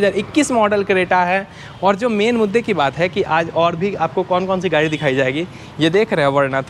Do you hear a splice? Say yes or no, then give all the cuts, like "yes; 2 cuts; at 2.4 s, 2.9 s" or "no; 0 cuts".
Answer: no; 0 cuts